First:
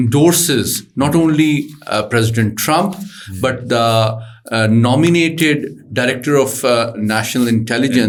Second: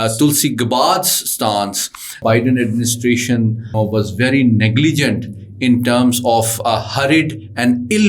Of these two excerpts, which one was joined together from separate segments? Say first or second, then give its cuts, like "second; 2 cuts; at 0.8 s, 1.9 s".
second; 2 cuts; at 2.2 s, 3.8 s